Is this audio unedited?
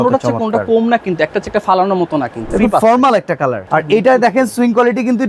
no; 2 cuts; at 2.4 s, 3.6 s

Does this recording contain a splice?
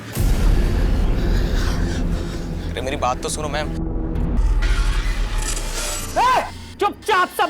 yes; 1 cut; at 4.4 s

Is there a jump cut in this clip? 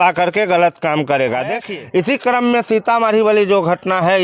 yes; 1 cut; at 1.6 s

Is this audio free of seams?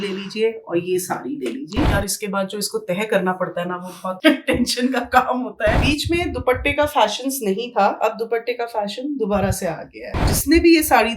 no; 3 cuts; at 1.9 s, 5.8 s, 10.1 s

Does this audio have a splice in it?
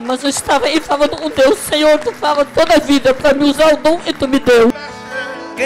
yes; 1 cut; at 4.7 s

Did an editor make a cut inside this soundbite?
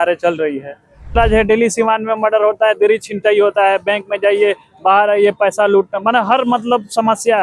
yes; 1 cut; at 1.1 s

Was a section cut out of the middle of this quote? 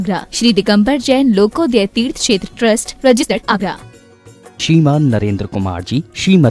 yes; 1 cut; at 3.6 s

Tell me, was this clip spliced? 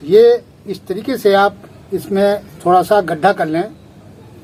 no; 0 cuts

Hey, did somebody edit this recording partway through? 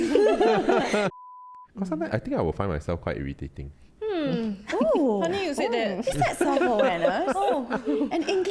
yes; 1 cut; at 1.2 s

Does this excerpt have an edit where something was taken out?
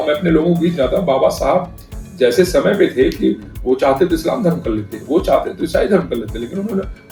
no; 0 cuts

